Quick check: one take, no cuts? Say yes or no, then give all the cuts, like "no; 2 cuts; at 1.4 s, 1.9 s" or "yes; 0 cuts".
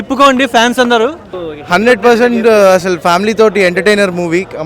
no; 1 cut; at 1.3 s